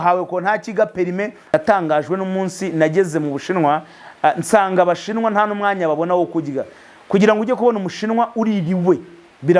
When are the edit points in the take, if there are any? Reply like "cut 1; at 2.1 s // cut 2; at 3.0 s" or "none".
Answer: cut 1; at 1.4 s